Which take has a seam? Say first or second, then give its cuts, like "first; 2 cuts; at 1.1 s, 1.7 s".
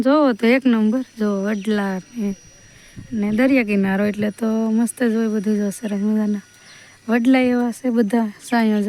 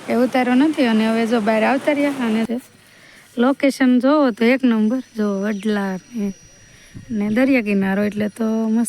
second; 1 cut; at 2.5 s